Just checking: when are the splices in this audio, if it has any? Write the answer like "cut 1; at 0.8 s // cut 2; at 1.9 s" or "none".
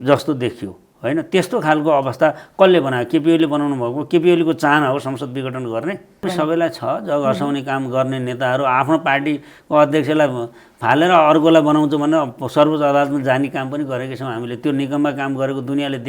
cut 1; at 6.3 s